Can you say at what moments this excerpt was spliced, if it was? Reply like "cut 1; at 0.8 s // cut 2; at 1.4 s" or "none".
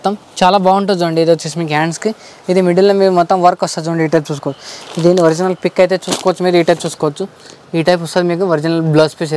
none

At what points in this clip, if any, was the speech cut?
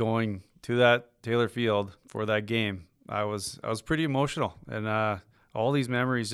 none

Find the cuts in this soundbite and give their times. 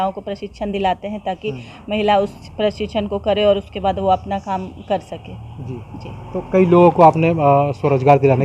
none

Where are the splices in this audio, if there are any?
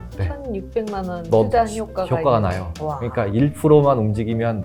none

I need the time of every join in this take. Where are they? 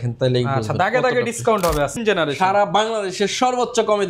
cut 1; at 2.0 s

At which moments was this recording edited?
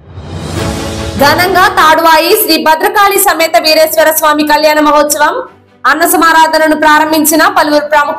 cut 1; at 1.1 s

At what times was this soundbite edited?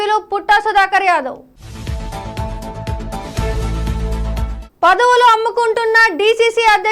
none

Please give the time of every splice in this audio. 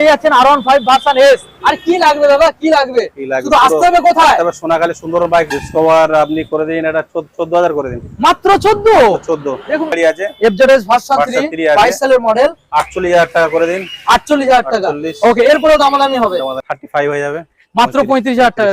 cut 1; at 5.6 s // cut 2; at 9.9 s // cut 3; at 16.6 s

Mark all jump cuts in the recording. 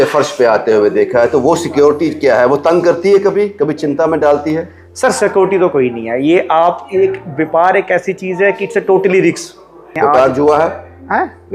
cut 1; at 9.9 s

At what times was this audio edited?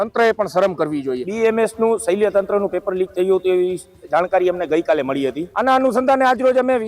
cut 1; at 1.3 s // cut 2; at 5.5 s

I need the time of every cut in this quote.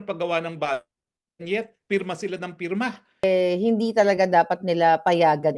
cut 1; at 3.2 s

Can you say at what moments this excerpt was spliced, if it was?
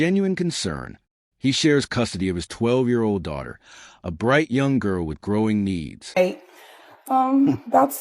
none

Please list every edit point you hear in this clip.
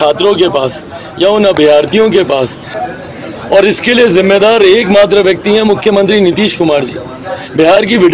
cut 1; at 2.7 s

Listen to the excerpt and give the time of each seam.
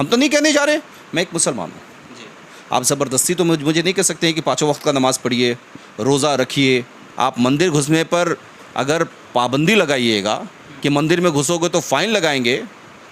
cut 1; at 1.0 s // cut 2; at 7.0 s

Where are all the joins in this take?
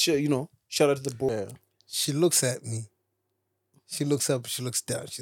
cut 1; at 1.3 s

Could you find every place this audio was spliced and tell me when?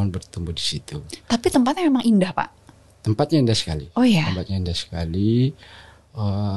none

